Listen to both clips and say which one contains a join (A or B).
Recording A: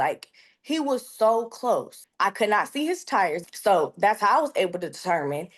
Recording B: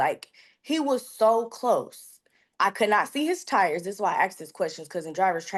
A